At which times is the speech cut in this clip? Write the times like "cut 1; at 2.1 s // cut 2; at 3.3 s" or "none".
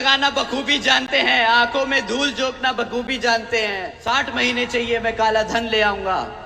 cut 1; at 3.9 s